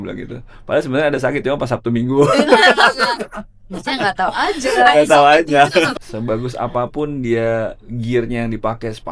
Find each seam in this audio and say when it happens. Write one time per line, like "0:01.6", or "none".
0:05.9